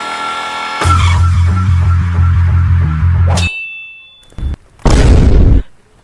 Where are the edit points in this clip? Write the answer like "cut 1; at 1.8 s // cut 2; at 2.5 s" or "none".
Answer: none